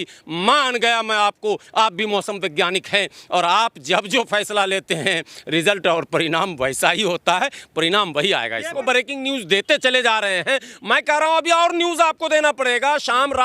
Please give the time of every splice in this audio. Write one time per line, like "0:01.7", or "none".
0:08.8